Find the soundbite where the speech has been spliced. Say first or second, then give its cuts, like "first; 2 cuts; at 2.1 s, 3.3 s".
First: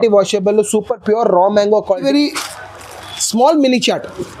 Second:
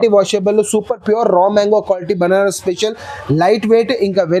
first; 1 cut; at 2.0 s